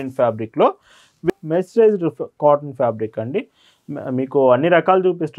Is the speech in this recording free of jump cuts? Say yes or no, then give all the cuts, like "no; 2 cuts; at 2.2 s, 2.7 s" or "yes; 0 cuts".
no; 1 cut; at 1.3 s